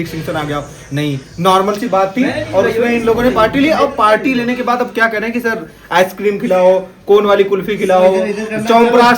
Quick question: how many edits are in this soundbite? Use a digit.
0